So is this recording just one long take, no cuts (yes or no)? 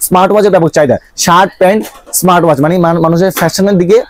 yes